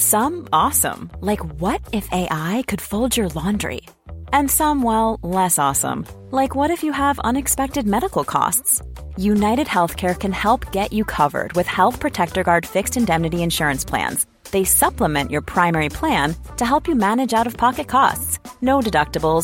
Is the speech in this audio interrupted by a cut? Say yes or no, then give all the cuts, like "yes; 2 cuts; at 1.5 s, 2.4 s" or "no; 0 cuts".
no; 0 cuts